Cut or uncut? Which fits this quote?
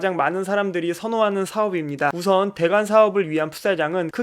cut